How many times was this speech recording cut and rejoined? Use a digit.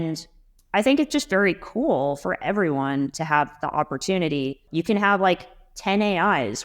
1